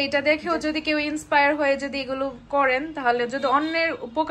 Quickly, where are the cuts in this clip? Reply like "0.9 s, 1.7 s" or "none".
none